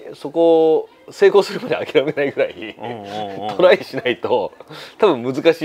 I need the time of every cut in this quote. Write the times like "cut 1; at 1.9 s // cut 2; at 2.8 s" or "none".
none